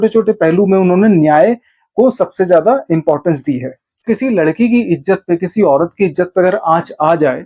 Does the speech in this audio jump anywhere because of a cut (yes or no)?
yes